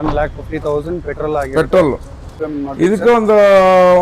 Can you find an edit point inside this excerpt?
yes; 1 cut; at 2.3 s

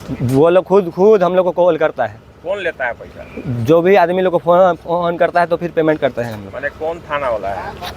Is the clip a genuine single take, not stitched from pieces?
yes; 0 cuts

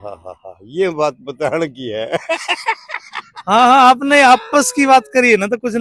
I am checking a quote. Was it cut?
no; 0 cuts

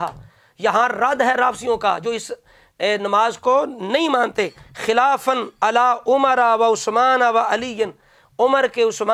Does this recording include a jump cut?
no; 0 cuts

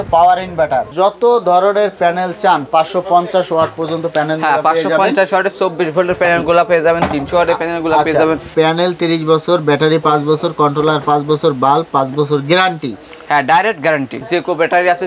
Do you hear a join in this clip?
yes; 3 cuts; at 0.9 s, 8.5 s, 14.2 s

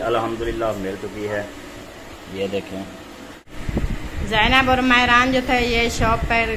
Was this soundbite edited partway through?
yes; 1 cut; at 3.5 s

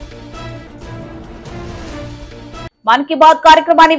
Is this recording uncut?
yes; 0 cuts

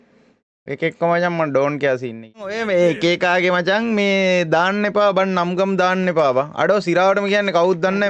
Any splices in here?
yes; 1 cut; at 2.6 s

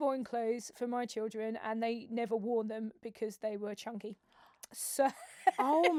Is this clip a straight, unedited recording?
yes; 0 cuts

